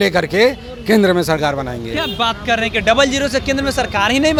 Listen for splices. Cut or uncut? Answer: uncut